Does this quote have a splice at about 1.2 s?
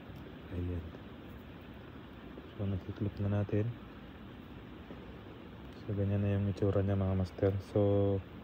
no; 0 cuts

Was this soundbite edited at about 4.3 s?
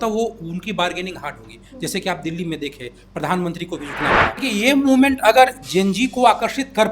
yes; 1 cut; at 4.3 s

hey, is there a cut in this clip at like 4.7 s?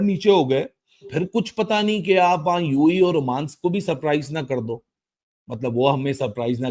no; 1 cut; at 1.1 s

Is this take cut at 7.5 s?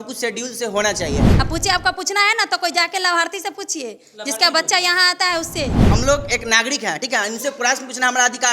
no; 2 cuts; at 1.3 s, 5.8 s

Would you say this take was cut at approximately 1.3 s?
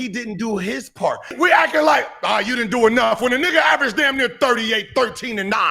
yes; 1 cut; at 1.3 s

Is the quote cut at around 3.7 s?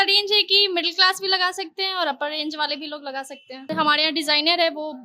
yes; 1 cut; at 3.7 s

